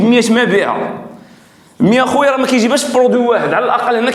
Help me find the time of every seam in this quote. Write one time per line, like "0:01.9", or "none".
none